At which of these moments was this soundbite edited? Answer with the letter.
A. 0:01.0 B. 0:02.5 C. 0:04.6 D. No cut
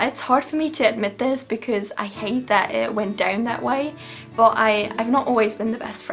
D